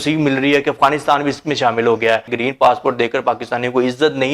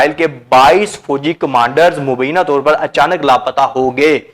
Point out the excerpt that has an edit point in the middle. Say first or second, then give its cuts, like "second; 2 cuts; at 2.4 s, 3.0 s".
first; 1 cut; at 2.3 s